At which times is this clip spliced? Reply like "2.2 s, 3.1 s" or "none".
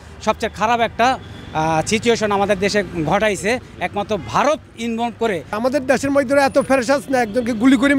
5.5 s